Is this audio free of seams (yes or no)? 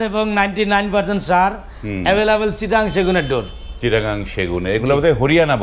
yes